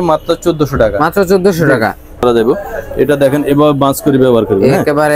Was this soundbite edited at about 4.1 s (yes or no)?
no